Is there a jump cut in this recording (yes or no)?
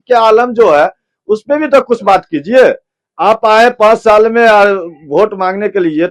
no